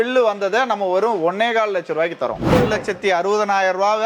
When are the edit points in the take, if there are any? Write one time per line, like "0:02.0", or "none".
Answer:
0:02.5